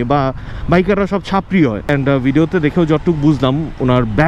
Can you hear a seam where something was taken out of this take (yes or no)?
yes